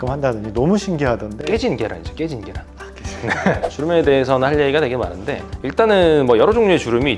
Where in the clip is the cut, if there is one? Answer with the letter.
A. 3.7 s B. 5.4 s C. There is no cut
A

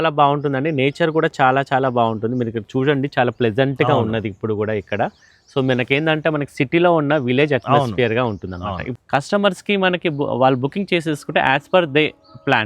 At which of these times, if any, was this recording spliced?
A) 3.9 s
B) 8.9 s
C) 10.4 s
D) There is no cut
B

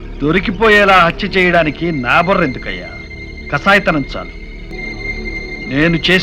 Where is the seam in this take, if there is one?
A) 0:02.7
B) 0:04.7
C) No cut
B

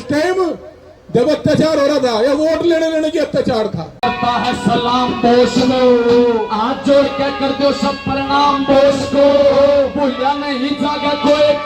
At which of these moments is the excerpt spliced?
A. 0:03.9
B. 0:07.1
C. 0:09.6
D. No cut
A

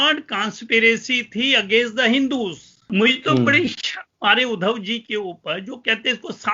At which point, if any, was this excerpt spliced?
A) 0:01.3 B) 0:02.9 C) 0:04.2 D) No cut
B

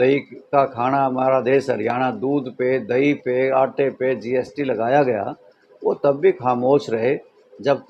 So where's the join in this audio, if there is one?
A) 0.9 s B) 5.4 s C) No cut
C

